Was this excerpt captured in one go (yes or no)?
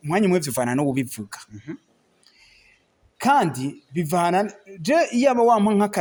yes